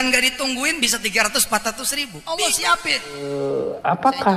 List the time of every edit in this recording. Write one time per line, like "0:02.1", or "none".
0:03.3